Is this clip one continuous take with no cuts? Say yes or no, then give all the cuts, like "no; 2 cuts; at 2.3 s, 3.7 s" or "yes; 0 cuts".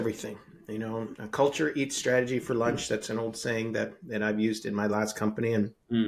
yes; 0 cuts